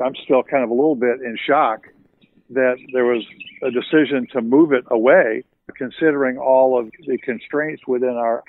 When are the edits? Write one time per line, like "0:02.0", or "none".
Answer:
none